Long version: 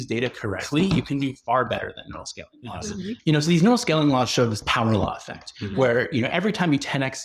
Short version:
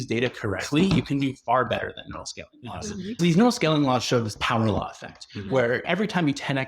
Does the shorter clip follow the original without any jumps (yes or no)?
no